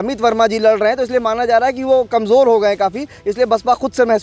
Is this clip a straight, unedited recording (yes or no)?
yes